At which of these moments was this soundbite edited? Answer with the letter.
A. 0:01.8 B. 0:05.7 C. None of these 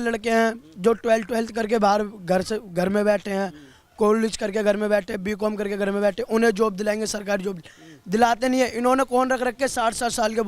C